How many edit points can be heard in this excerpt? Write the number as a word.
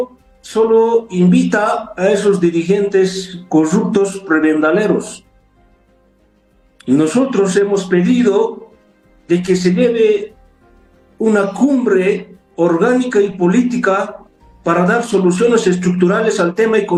zero